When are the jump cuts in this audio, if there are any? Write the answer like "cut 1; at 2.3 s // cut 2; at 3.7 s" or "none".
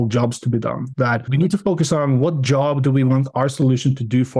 cut 1; at 1.0 s